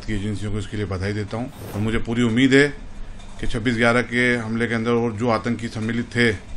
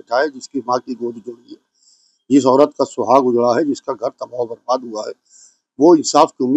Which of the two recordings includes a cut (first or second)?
first